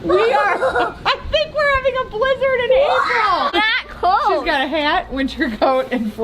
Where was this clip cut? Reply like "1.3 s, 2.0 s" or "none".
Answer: 3.5 s